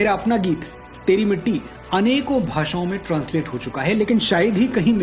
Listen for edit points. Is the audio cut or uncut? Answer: uncut